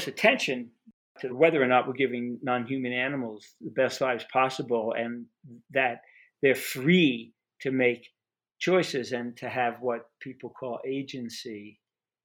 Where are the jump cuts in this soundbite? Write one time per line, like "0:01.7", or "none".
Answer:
0:01.3

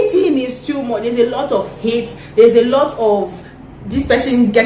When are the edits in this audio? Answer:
none

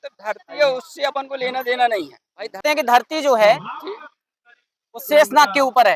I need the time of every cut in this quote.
0:02.6

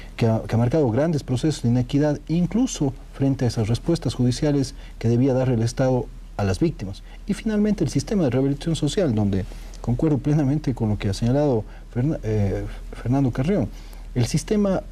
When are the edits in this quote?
none

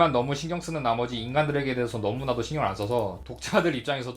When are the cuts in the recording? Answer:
none

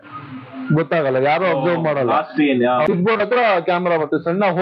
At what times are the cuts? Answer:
0:02.9

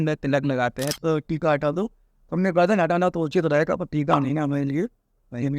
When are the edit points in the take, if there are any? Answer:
0:00.9

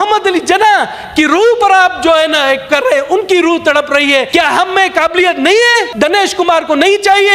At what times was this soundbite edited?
0:04.3
0:05.9

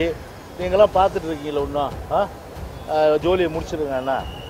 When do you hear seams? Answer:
none

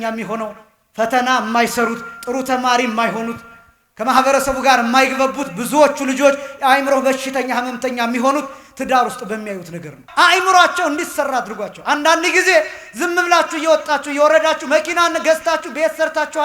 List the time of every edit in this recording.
0:10.0

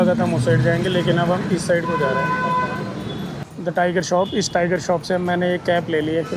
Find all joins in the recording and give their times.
0:03.4

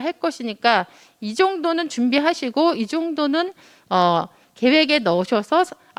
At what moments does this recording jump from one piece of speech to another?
none

